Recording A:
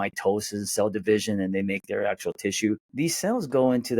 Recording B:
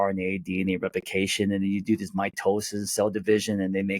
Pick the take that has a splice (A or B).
A